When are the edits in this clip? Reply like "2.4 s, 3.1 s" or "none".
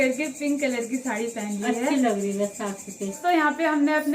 3.1 s